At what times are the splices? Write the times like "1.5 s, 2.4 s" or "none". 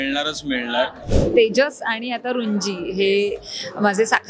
1.0 s